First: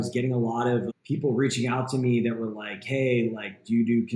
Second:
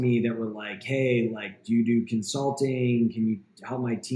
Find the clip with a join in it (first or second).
first